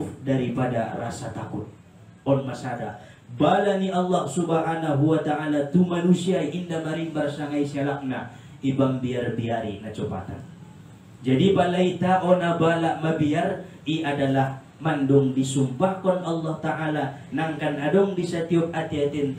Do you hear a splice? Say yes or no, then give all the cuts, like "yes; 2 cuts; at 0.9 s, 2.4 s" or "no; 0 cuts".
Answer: no; 0 cuts